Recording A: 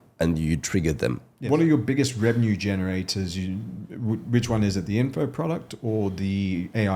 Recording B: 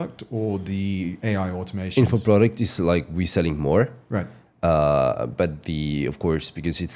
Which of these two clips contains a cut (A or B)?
A